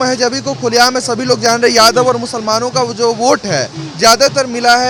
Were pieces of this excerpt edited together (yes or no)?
no